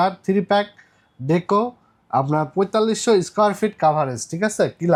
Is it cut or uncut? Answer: uncut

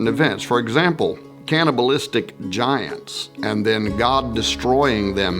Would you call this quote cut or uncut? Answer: cut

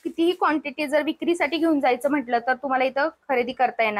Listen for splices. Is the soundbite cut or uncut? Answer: uncut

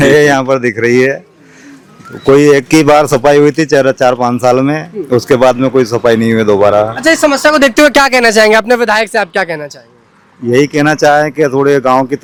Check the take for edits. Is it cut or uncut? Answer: uncut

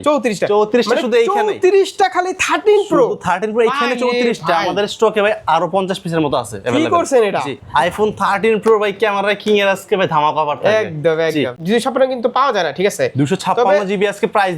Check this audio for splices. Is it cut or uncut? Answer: cut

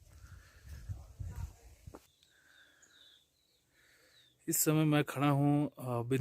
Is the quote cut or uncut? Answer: cut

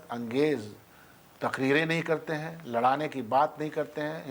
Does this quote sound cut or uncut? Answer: uncut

